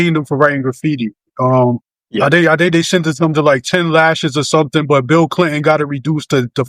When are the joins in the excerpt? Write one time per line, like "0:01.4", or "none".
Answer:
0:01.9